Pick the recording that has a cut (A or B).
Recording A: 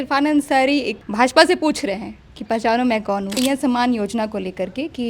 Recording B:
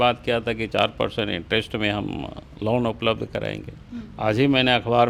A